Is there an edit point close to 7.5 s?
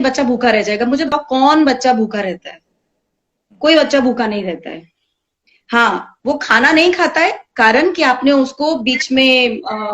no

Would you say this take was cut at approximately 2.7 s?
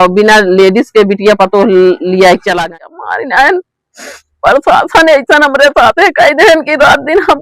yes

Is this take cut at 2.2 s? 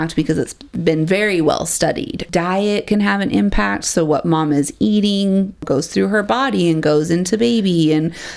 yes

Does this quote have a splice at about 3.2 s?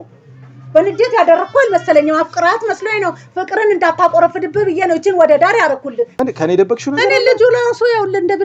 no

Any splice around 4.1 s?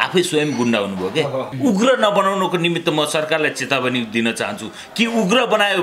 no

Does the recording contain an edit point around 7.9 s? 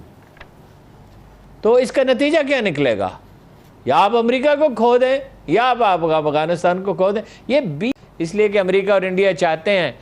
yes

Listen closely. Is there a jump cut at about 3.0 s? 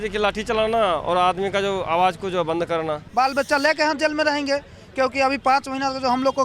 yes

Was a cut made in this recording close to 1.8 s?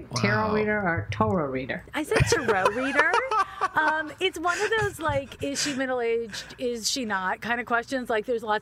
yes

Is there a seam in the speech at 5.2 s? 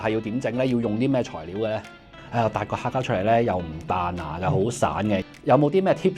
yes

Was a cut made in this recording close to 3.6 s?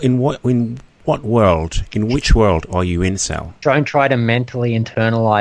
yes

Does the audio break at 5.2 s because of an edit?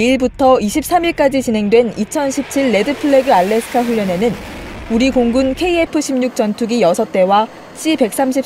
no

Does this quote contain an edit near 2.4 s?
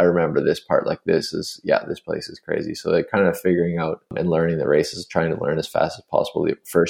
no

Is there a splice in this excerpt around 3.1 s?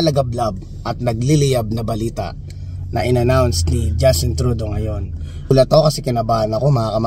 no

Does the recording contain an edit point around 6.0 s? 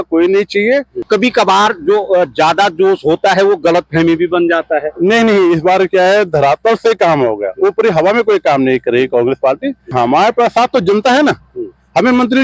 no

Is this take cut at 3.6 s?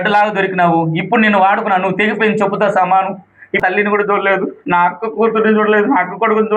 yes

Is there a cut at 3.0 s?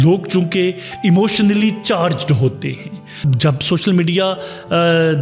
yes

